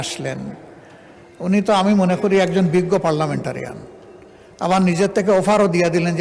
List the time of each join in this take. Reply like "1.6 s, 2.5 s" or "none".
none